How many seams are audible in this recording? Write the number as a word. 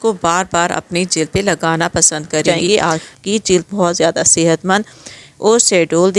one